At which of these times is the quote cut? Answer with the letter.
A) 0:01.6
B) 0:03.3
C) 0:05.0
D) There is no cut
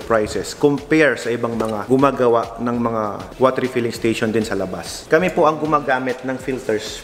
C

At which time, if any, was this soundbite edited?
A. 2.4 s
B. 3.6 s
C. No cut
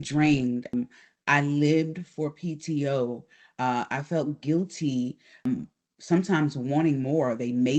C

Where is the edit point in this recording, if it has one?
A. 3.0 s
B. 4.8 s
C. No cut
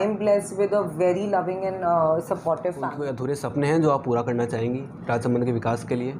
A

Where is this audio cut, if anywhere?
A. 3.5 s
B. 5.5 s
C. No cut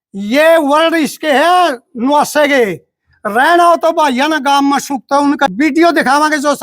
B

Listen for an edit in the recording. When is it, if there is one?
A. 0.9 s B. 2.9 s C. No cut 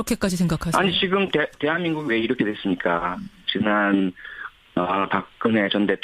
A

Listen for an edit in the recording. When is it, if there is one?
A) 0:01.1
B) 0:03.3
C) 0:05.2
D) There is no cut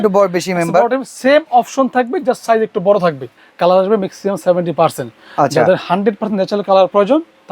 B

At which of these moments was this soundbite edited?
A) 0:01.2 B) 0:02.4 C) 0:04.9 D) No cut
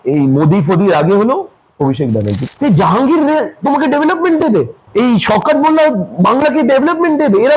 B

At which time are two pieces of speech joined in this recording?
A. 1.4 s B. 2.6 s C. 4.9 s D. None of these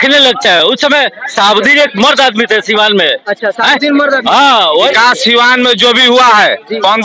C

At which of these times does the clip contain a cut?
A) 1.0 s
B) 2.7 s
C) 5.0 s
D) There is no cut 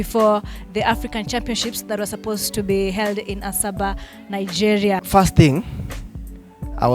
C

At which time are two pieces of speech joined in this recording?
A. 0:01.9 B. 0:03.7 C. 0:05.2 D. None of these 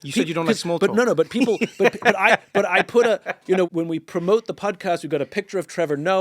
B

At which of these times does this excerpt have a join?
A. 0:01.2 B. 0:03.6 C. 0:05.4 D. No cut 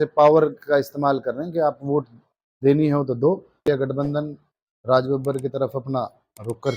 B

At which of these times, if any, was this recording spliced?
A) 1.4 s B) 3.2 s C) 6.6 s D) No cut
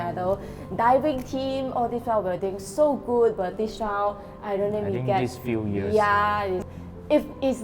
C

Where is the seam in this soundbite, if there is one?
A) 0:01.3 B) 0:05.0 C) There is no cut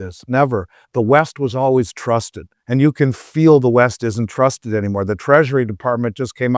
C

